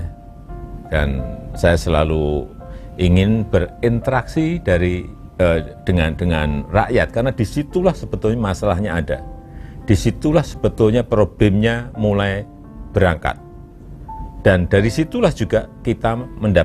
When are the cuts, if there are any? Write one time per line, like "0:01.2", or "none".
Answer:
none